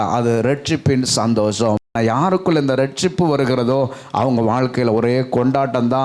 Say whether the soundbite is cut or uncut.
cut